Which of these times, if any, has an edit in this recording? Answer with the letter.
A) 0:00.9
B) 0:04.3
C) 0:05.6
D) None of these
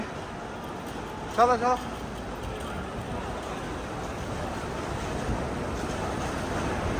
D